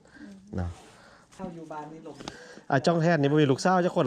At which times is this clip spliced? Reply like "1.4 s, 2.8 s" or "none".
1.3 s